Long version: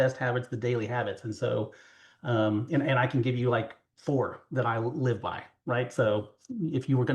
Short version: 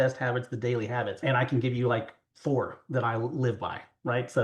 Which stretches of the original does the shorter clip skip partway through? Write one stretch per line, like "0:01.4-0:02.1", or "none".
0:01.2-0:02.8